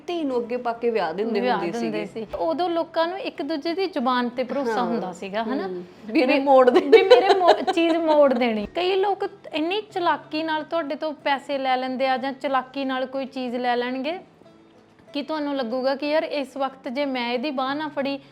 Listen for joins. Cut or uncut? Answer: cut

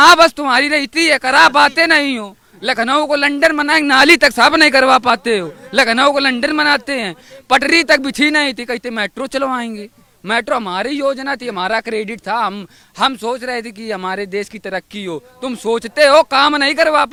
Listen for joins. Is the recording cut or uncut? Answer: uncut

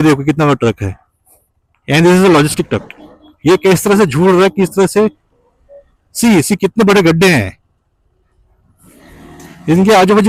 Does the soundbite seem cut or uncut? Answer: uncut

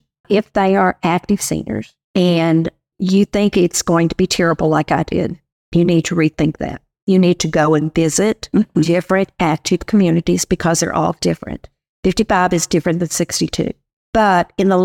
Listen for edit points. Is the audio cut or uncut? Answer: uncut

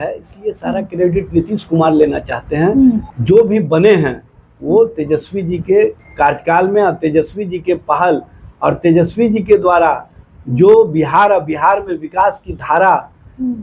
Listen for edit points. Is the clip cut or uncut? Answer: cut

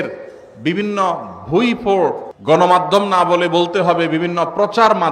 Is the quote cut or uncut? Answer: cut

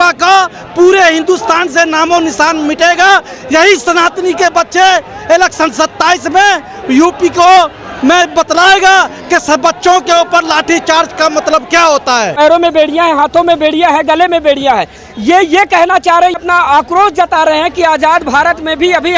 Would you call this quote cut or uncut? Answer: cut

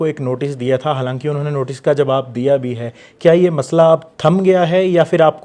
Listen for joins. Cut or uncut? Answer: uncut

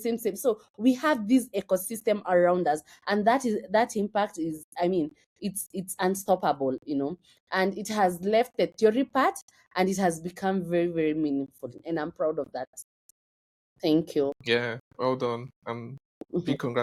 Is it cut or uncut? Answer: uncut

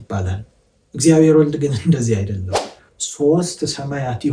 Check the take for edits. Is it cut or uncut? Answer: cut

